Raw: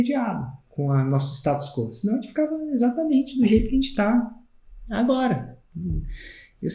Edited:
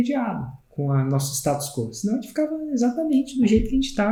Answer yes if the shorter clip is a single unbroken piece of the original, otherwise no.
yes